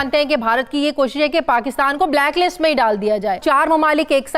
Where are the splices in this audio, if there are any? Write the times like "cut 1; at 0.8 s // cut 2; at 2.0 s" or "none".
cut 1; at 3.4 s